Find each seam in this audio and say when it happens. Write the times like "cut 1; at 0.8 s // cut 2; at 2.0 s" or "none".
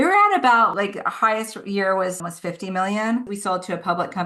cut 1; at 3.2 s